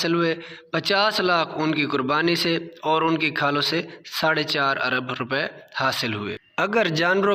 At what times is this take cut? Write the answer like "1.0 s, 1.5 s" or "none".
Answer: none